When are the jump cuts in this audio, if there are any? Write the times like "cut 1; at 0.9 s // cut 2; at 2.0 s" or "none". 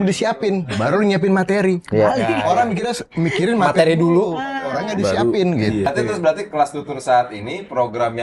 cut 1; at 5.9 s

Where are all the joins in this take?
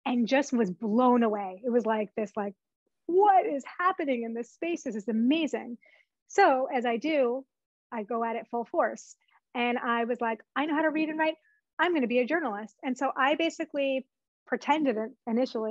none

